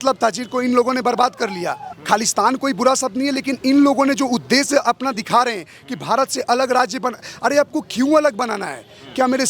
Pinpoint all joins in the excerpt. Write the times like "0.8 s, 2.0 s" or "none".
1.9 s